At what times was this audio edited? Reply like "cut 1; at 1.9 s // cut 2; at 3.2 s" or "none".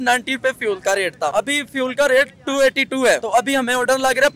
cut 1; at 1.3 s // cut 2; at 3.2 s